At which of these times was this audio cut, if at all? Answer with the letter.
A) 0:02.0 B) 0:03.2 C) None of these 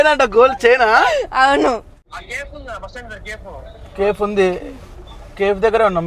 A